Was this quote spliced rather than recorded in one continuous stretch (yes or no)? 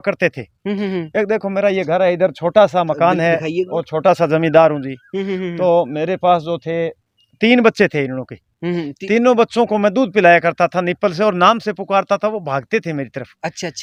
no